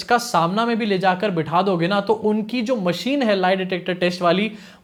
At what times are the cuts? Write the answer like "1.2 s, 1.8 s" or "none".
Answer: none